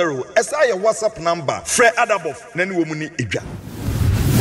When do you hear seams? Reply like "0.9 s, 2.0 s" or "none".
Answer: 3.4 s

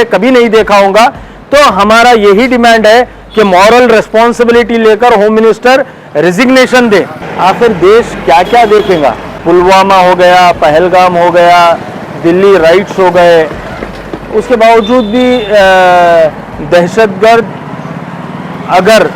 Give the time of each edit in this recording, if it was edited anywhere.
7.2 s, 9.3 s

